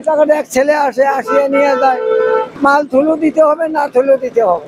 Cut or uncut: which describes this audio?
cut